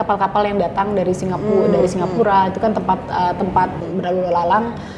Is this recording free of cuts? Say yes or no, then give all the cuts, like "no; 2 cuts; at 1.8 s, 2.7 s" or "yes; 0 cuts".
no; 1 cut; at 3.8 s